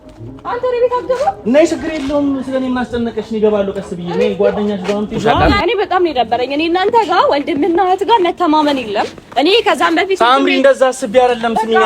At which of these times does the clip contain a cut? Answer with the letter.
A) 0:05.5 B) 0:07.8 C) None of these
A